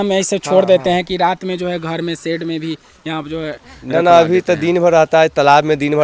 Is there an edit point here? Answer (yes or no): no